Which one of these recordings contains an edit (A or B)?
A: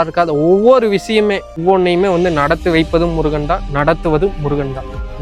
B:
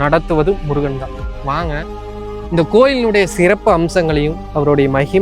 A